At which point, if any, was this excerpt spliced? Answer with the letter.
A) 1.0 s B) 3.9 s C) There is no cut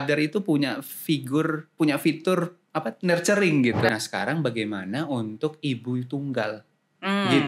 B